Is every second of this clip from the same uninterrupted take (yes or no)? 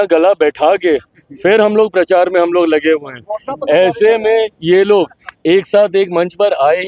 yes